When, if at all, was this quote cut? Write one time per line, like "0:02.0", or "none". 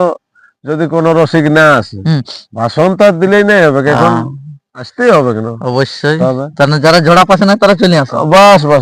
none

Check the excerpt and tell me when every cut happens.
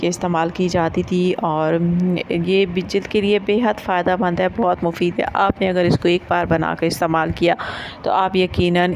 none

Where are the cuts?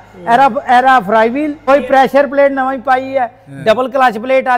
0:01.7

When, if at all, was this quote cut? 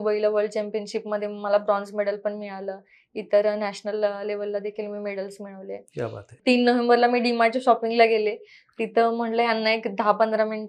0:06.3

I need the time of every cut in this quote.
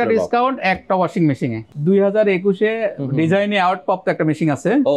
0:01.7

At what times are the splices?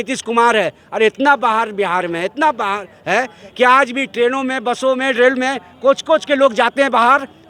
none

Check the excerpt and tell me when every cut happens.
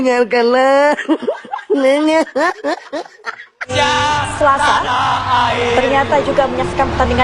0:03.7

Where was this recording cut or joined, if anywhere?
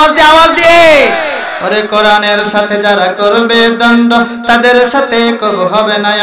none

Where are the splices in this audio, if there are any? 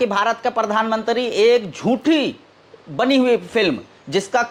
none

